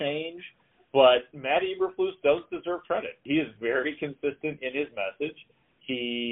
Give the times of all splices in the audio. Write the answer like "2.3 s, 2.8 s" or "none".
1.3 s, 3.2 s